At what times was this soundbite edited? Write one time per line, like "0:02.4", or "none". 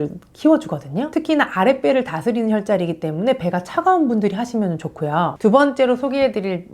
0:05.4